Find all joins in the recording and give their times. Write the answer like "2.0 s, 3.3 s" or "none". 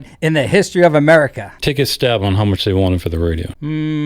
1.5 s